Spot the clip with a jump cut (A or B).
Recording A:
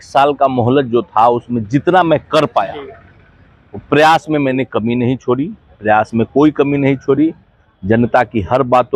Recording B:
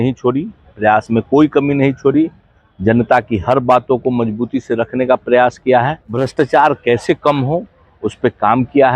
B